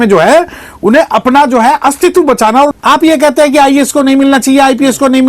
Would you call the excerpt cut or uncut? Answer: cut